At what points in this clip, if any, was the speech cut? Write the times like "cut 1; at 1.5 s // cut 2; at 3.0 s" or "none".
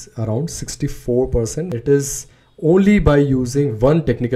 cut 1; at 1.7 s